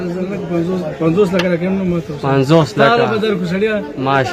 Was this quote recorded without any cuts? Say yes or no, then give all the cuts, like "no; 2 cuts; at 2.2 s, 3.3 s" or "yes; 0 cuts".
yes; 0 cuts